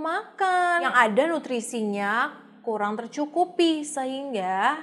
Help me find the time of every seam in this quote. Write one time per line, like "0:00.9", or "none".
0:00.9